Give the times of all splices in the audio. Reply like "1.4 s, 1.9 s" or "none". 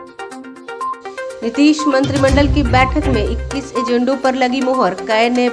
1.3 s